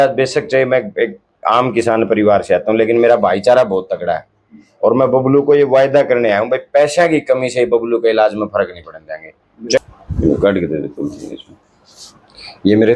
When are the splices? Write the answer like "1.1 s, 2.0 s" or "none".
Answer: 9.8 s